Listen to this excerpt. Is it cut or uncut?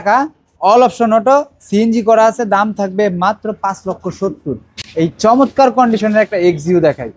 uncut